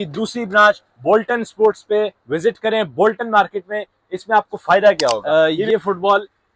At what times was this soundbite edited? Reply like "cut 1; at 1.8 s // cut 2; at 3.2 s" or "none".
cut 1; at 5.2 s